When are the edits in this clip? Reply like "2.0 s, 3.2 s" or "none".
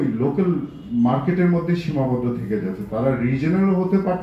none